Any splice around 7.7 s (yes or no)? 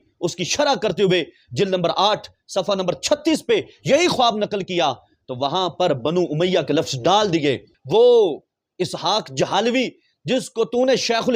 yes